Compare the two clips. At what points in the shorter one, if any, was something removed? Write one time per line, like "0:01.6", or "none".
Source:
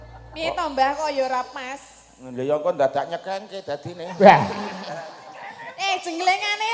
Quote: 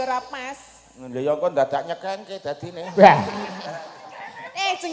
none